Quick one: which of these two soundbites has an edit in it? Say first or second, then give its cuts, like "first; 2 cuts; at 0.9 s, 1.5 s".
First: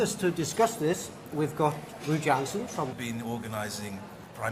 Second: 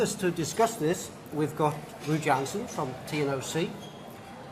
second; 1 cut; at 3.0 s